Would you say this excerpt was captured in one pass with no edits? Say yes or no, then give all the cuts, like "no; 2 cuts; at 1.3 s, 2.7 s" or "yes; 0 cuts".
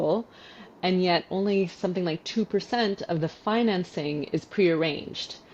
yes; 0 cuts